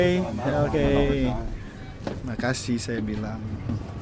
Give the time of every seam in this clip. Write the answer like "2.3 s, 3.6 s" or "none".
none